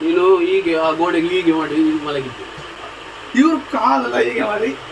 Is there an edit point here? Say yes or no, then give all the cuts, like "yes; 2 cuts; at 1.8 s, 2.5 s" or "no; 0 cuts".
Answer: no; 0 cuts